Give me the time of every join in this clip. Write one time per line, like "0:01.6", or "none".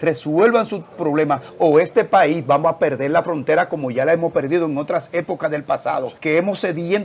0:06.1